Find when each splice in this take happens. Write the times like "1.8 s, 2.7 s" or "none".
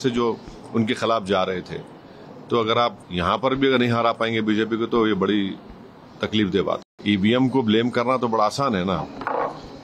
3.0 s, 6.9 s